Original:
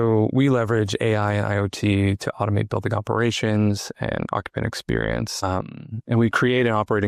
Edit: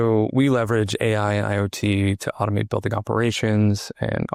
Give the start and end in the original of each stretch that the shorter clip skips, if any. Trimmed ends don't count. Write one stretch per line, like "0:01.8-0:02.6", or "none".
none